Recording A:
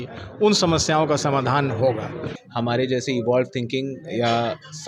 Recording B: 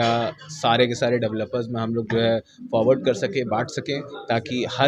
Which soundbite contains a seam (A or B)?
A